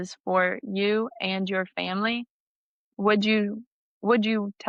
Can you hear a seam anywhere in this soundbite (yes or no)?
no